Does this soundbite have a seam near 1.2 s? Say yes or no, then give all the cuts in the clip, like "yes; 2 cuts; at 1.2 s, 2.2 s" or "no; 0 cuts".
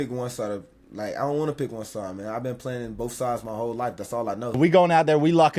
no; 1 cut; at 4.6 s